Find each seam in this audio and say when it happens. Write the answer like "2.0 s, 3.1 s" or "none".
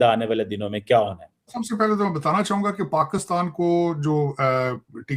1.6 s